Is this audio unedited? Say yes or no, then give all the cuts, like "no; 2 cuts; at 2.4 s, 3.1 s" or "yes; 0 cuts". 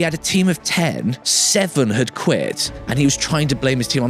no; 1 cut; at 1.3 s